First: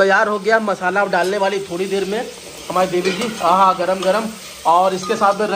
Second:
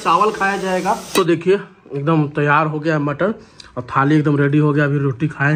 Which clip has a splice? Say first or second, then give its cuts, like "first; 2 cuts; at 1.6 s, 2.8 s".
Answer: second; 1 cut; at 1.1 s